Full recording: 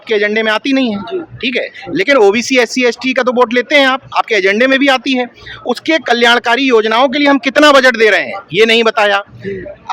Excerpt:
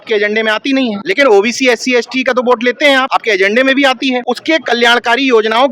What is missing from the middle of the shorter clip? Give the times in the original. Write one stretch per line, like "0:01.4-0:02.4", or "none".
0:01.0-0:01.9
0:04.0-0:04.1
0:05.3-0:05.7